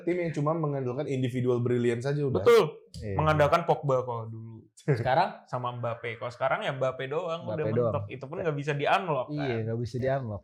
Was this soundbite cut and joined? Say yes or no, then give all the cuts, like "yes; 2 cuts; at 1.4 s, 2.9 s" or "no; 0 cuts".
no; 0 cuts